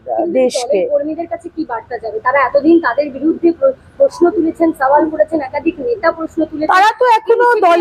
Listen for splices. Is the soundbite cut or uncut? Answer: uncut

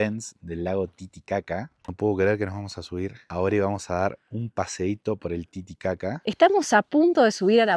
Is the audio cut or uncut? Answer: uncut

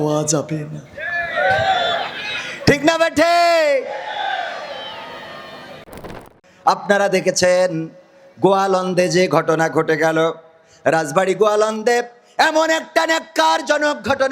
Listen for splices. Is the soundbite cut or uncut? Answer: cut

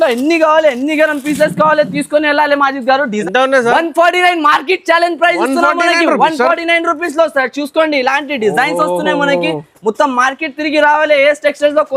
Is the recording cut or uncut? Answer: cut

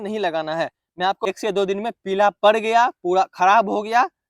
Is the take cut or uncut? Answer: cut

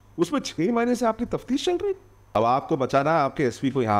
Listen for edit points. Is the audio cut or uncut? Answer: cut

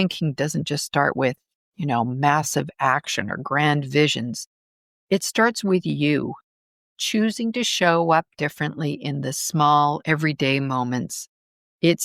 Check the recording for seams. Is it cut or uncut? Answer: uncut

